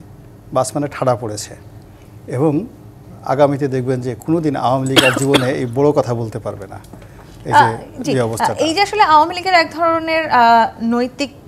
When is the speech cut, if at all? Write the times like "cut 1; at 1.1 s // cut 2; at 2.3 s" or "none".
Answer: none